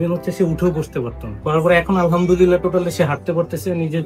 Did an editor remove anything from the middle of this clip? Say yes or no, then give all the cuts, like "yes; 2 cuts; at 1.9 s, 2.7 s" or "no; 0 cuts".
yes; 1 cut; at 1.4 s